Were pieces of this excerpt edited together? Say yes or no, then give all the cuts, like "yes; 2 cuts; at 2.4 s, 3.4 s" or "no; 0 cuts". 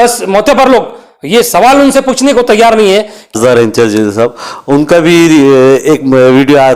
yes; 1 cut; at 3.4 s